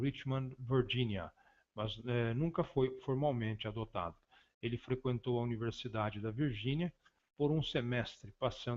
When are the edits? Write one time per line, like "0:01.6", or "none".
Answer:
0:06.6